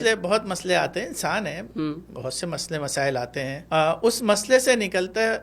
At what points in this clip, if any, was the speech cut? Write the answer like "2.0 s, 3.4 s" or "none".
3.6 s